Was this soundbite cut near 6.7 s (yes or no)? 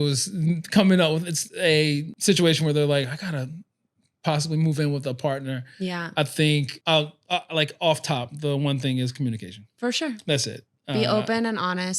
yes